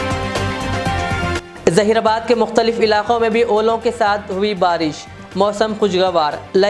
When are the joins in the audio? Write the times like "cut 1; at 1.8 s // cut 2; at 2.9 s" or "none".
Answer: cut 1; at 1.4 s